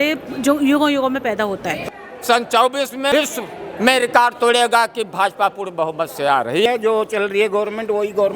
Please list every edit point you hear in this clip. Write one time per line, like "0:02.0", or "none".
0:01.8
0:03.1
0:06.7